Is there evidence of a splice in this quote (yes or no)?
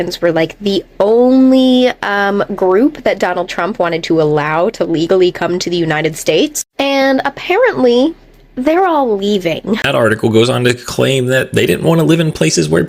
yes